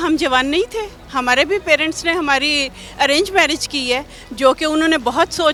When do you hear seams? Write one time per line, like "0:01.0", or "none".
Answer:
none